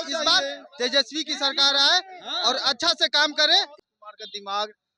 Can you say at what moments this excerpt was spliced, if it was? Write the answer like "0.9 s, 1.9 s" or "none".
3.8 s